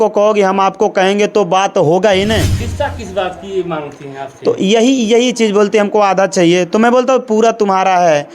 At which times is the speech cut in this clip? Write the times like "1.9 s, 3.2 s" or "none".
2.6 s